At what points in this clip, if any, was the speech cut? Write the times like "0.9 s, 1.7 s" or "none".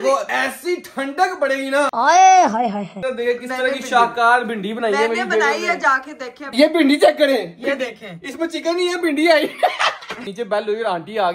2.9 s, 6.4 s, 10.3 s